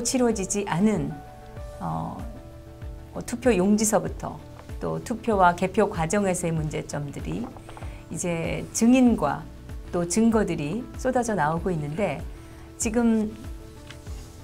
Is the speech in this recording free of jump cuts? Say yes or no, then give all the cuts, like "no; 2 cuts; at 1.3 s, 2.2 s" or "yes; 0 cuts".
yes; 0 cuts